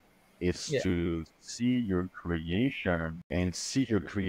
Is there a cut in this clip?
yes; 1 cut; at 3.2 s

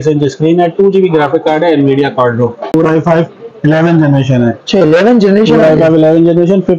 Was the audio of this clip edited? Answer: yes; 1 cut; at 2.7 s

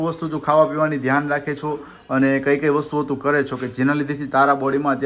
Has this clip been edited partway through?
no; 0 cuts

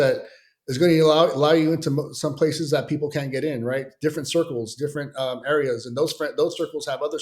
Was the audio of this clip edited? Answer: no; 0 cuts

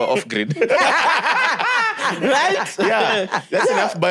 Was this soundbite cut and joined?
no; 0 cuts

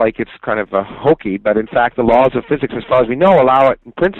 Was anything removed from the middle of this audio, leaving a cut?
no; 0 cuts

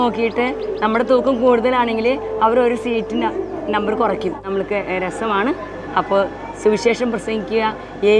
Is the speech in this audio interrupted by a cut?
yes; 1 cut; at 4.4 s

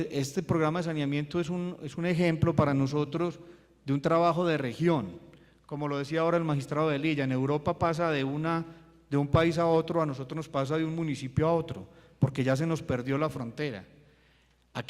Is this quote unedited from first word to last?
no; 1 cut; at 1.7 s

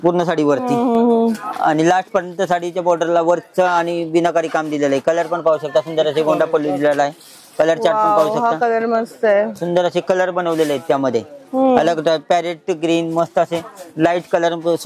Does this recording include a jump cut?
no; 0 cuts

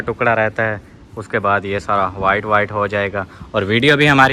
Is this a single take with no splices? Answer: yes; 0 cuts

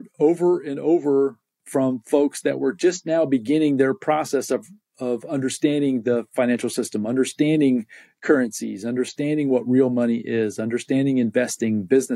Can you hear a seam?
no; 0 cuts

